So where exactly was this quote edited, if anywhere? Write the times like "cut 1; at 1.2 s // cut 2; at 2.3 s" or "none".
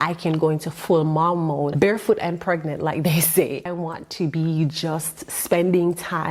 cut 1; at 1.7 s // cut 2; at 3.7 s